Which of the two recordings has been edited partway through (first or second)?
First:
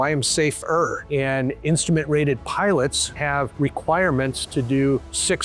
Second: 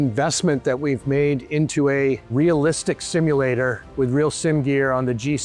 first